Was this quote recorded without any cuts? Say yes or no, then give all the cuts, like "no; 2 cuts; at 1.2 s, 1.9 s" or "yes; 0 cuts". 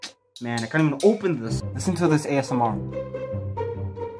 no; 1 cut; at 1.6 s